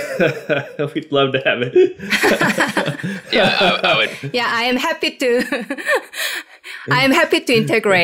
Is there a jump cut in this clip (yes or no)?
no